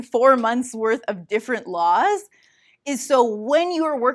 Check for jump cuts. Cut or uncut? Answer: uncut